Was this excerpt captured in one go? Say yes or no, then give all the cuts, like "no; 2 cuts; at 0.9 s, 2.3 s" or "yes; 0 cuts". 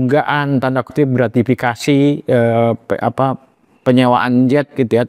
yes; 0 cuts